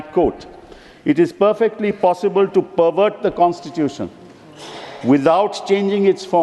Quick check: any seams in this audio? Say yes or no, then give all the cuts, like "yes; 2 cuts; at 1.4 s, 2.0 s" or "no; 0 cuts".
no; 0 cuts